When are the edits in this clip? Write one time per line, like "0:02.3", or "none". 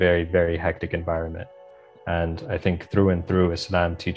none

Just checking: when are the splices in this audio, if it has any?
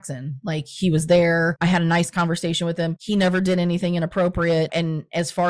none

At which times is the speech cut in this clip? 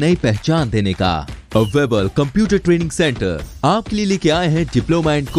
none

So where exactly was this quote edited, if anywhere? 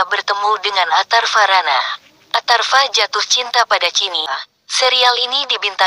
0:04.1

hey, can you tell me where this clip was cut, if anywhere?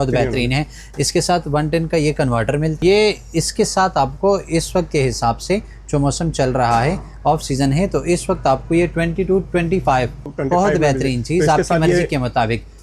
0:02.8
0:10.3

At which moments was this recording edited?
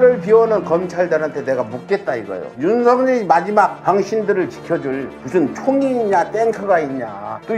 none

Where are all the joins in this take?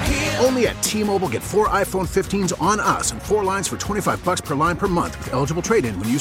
none

